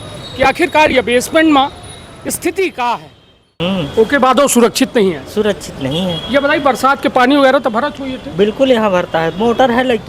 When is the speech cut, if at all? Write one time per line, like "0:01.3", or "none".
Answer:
0:03.5